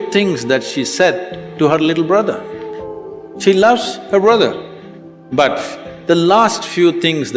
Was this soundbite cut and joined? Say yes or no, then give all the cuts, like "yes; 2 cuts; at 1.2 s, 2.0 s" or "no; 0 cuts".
no; 0 cuts